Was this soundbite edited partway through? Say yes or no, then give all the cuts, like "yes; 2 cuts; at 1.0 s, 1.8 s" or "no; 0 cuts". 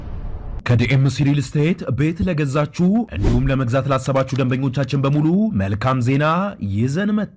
no; 0 cuts